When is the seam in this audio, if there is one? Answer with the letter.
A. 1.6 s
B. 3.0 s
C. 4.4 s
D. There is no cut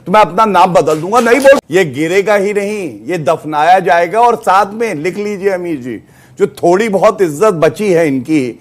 A